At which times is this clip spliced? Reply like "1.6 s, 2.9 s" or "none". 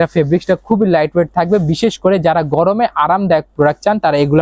none